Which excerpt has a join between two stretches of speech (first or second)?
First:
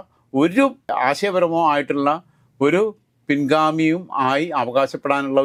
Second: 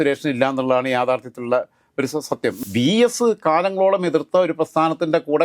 second